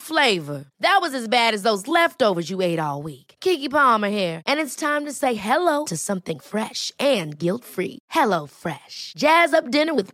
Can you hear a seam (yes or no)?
no